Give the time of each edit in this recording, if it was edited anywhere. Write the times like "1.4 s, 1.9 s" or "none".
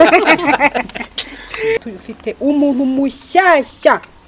1.8 s